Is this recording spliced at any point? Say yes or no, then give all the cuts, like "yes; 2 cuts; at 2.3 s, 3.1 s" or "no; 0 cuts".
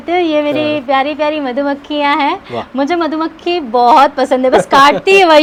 no; 0 cuts